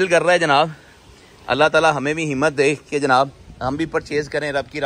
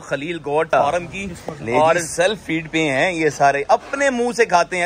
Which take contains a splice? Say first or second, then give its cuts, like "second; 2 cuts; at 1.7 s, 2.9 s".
second; 1 cut; at 2.1 s